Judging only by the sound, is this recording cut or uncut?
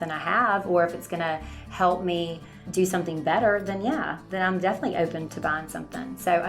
cut